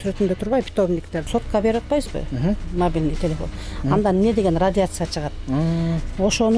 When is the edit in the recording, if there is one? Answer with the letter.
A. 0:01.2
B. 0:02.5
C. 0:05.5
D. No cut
A